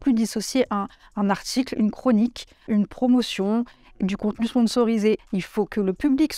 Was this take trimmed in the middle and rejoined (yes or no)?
yes